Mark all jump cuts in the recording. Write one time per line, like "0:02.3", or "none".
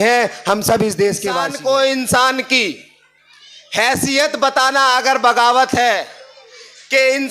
0:01.3